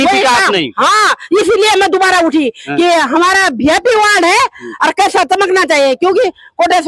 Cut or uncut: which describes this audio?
uncut